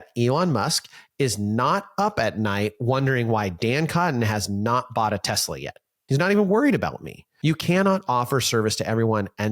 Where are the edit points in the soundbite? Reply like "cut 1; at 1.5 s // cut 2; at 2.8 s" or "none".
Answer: cut 1; at 7.2 s